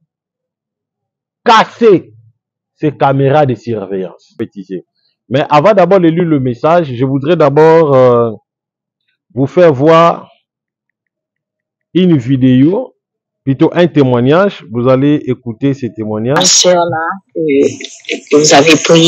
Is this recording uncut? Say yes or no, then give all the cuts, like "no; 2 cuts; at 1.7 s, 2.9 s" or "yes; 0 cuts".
no; 2 cuts; at 4.3 s, 16.5 s